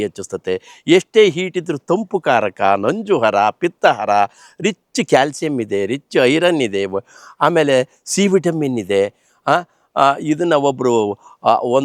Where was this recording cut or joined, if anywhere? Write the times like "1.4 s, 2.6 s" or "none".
none